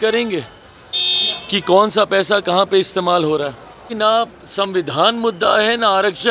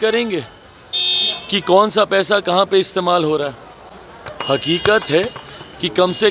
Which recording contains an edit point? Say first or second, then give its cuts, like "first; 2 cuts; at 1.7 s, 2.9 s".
first; 1 cut; at 3.9 s